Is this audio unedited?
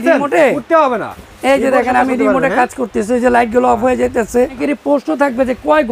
no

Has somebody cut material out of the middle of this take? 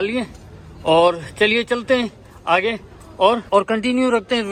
no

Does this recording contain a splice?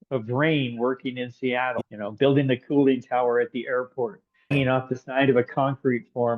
yes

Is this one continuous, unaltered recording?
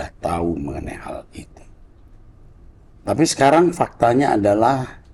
yes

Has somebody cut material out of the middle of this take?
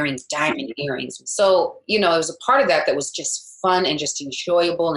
yes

